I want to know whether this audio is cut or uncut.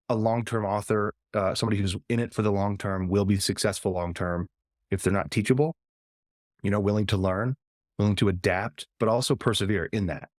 uncut